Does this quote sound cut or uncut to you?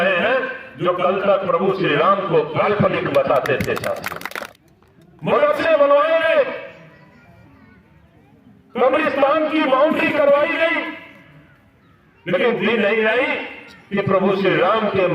cut